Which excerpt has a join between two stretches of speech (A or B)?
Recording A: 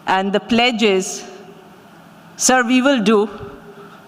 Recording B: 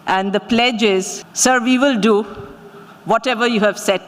B